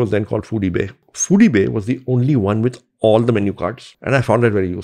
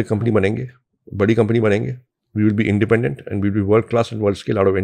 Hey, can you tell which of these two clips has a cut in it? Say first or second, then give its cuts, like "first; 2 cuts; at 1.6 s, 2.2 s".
first; 2 cuts; at 1.1 s, 3.9 s